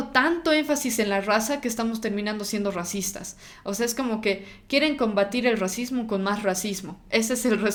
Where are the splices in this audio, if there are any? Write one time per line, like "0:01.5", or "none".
none